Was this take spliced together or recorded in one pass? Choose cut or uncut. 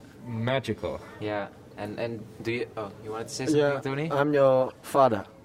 uncut